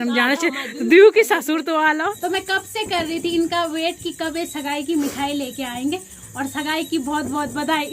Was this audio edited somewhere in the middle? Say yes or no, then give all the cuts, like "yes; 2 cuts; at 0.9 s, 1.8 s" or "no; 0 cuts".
yes; 1 cut; at 2.2 s